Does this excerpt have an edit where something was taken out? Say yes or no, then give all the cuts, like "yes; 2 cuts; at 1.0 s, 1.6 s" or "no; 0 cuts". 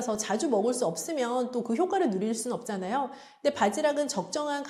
no; 0 cuts